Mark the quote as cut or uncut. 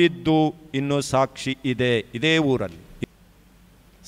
cut